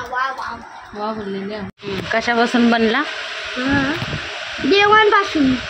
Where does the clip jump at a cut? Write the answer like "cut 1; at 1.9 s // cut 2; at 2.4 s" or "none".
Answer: cut 1; at 1.8 s